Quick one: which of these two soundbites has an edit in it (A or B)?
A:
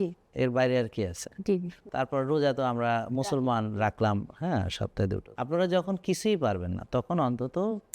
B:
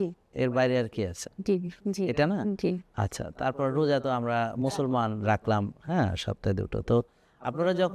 A